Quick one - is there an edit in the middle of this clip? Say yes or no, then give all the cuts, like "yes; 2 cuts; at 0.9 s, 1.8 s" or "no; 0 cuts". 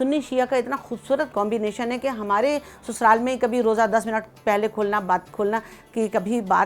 yes; 1 cut; at 1.3 s